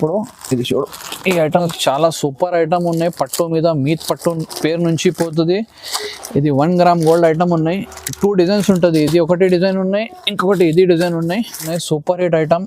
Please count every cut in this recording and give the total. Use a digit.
2